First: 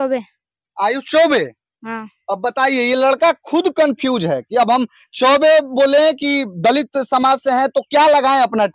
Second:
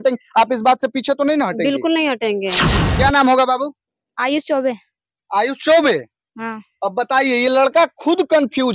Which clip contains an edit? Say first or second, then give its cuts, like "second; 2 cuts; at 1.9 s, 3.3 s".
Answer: second; 1 cut; at 2.7 s